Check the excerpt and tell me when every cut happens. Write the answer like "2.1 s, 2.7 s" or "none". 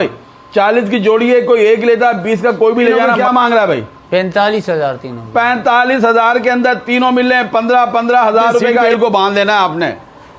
3.2 s, 8.9 s